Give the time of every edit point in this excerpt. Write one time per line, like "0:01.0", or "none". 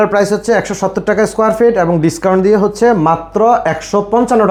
none